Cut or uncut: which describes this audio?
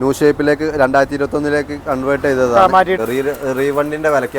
cut